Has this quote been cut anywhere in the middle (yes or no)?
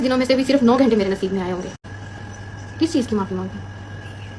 yes